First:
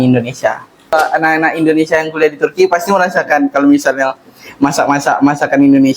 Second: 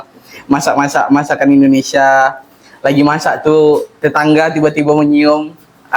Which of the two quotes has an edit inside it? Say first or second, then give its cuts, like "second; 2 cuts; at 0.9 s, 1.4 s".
first; 1 cut; at 0.9 s